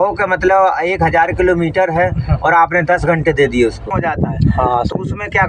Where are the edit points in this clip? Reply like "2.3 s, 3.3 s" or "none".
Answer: 3.9 s